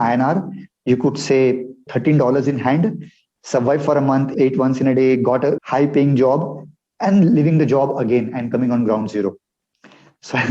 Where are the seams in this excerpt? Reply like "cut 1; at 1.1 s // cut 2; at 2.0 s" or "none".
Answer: cut 1; at 1.9 s // cut 2; at 4.3 s // cut 3; at 5.6 s